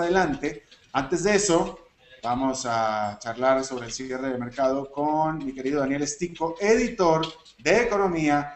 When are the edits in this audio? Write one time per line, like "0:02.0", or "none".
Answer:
0:05.9